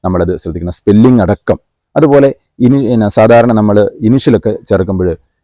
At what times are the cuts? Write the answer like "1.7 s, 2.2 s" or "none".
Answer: none

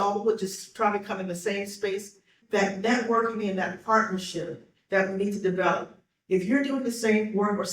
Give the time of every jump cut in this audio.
2.4 s

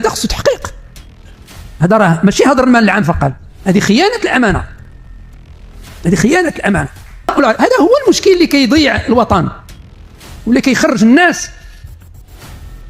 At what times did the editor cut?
7.3 s

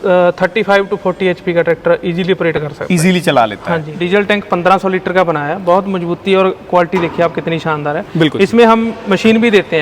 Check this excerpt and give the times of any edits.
3.9 s

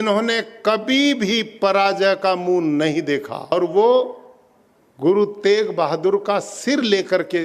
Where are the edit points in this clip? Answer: 3.5 s

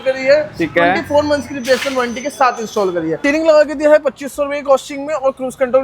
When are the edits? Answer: 3.2 s

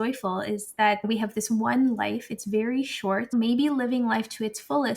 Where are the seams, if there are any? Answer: 1.0 s, 3.3 s

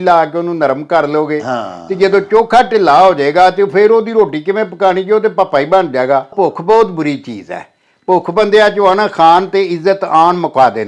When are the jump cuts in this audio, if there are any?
6.3 s

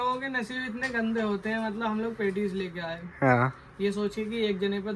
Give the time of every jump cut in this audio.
none

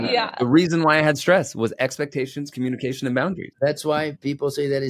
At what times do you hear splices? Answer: 3.8 s

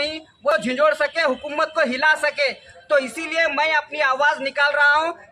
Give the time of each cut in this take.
none

